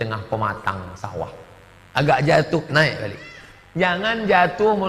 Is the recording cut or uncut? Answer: uncut